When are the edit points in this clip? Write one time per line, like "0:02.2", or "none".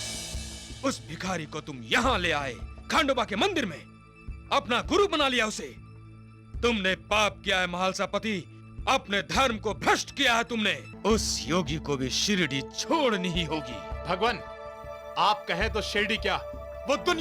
0:10.9